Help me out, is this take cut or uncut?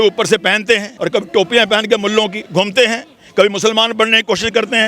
cut